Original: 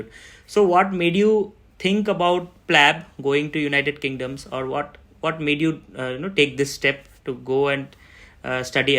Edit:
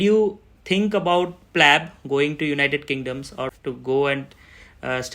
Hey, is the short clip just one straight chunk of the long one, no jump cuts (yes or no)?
no